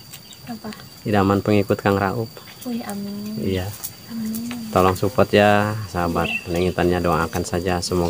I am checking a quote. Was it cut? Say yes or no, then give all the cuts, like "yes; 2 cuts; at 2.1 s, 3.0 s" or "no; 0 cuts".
no; 0 cuts